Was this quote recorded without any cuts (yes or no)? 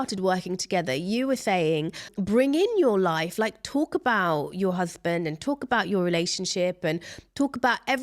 no